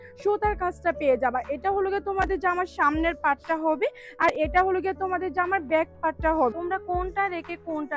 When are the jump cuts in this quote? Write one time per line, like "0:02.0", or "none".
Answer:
0:06.5